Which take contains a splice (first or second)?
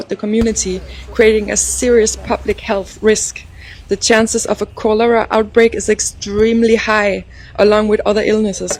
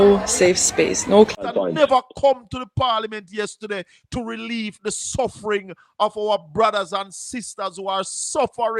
second